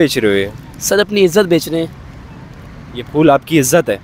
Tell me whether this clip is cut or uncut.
uncut